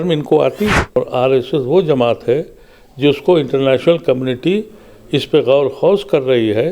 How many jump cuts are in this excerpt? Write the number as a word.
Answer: one